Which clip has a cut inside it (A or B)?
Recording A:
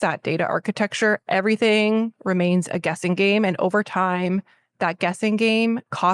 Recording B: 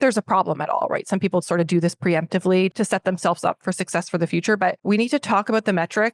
B